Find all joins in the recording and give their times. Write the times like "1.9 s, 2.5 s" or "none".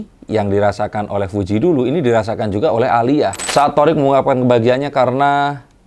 3.4 s